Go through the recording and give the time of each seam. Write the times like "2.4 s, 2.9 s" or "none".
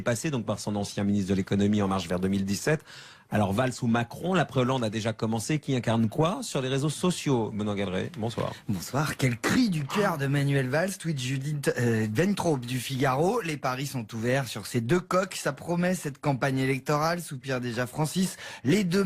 15.2 s